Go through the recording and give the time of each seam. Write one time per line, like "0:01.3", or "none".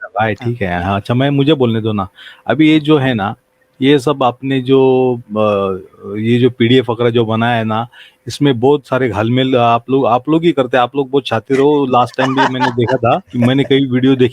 0:13.3